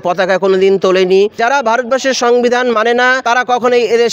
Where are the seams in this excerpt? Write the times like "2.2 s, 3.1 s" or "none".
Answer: 1.3 s, 3.2 s